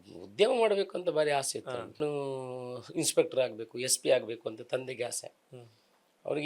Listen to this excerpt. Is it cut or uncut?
cut